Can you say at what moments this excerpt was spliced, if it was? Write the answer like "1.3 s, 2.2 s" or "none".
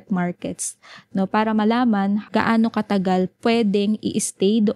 2.2 s, 3.3 s